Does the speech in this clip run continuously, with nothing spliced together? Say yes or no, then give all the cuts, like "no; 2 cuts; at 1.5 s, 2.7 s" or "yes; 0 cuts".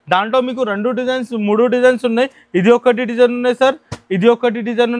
yes; 0 cuts